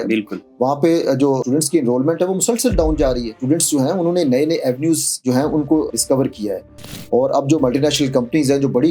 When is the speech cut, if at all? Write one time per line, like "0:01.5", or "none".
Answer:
0:01.4
0:03.3
0:05.9